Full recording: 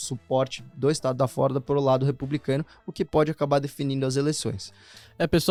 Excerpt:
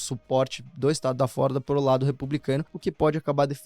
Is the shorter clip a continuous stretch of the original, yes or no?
no